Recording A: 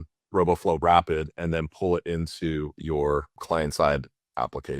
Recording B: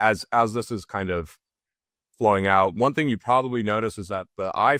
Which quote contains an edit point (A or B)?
A